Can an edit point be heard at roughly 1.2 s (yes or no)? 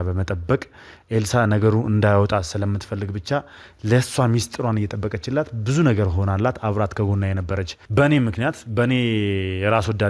no